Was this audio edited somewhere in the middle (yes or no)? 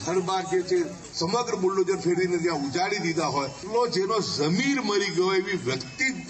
yes